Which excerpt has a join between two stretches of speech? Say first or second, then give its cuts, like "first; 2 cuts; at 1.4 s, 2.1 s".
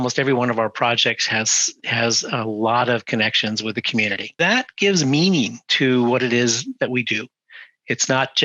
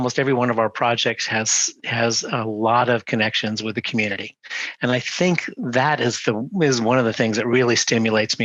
first; 1 cut; at 4.2 s